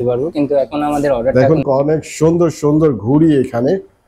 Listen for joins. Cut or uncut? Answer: cut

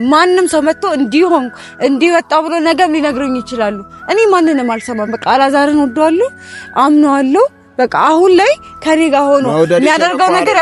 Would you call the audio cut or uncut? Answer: uncut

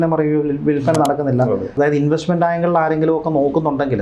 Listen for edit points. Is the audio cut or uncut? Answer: cut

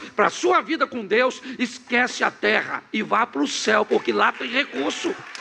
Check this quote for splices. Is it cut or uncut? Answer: uncut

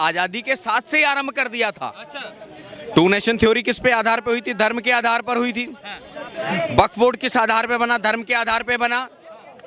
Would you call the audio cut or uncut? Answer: uncut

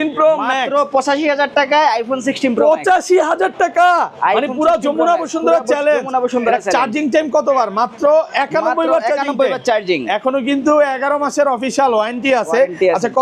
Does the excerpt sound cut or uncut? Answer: uncut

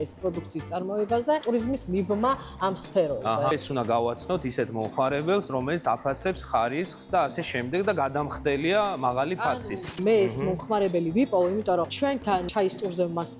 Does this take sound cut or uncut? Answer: cut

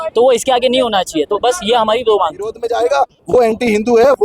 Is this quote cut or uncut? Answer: cut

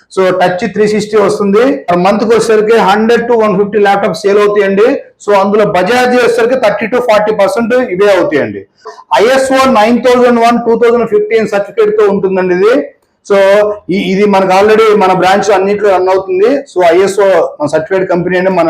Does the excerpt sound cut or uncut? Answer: cut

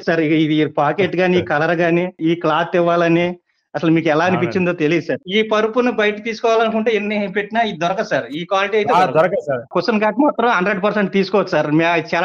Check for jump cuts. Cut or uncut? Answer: cut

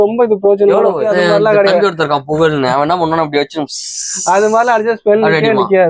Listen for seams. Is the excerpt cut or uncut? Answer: cut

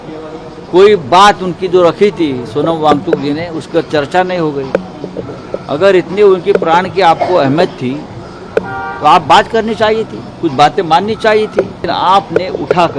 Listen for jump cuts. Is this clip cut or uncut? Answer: cut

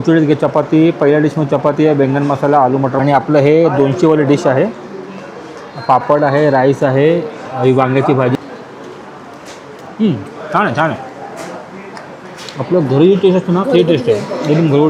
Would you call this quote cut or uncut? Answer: cut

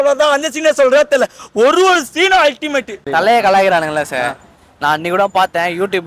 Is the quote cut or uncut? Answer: cut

